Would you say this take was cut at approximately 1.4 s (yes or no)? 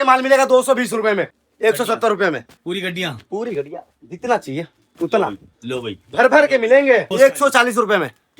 yes